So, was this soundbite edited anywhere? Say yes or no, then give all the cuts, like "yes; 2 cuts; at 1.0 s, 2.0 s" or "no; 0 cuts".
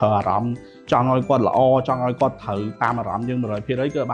no; 0 cuts